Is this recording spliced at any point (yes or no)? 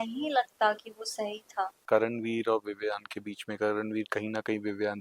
yes